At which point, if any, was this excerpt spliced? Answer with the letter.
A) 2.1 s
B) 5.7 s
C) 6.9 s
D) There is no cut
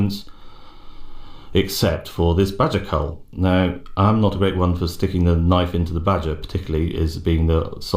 C